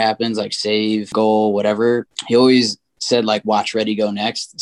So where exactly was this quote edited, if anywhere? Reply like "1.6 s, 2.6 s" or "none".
1.1 s, 2.1 s